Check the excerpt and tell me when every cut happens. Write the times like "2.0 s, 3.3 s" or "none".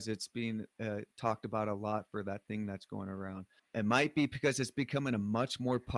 3.5 s